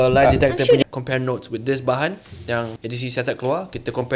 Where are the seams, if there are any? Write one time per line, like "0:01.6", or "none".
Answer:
0:00.8
0:02.8

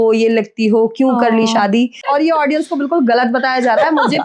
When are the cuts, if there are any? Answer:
0:02.0

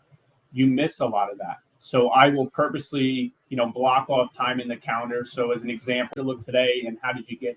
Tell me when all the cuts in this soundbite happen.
0:06.1

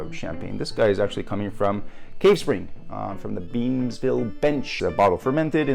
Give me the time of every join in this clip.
0:04.7

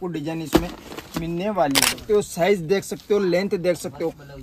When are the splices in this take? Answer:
0:01.9

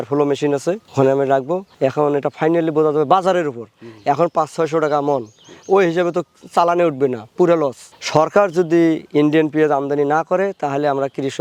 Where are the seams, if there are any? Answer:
none

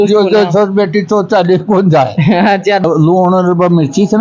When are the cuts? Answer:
0:02.8

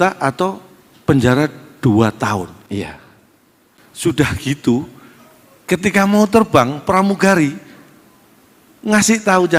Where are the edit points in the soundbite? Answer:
none

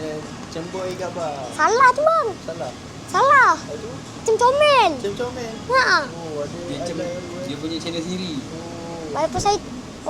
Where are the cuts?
none

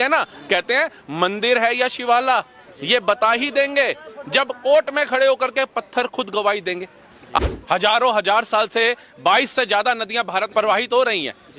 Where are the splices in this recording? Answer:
0:07.4
0:10.5

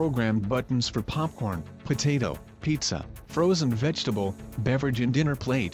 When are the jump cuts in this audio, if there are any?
none

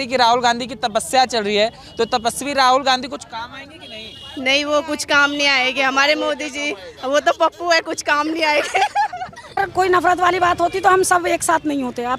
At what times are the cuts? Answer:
0:09.6

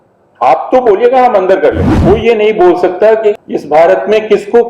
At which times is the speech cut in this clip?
0:01.9
0:03.3

